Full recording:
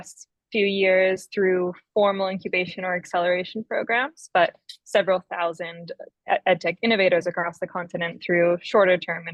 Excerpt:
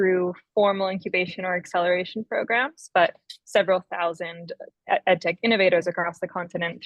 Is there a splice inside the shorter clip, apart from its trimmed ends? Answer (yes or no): no